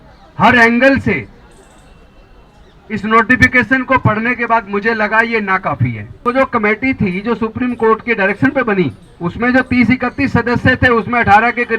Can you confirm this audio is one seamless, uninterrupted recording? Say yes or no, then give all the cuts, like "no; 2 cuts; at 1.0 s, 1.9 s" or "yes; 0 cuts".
no; 2 cuts; at 6.2 s, 9.1 s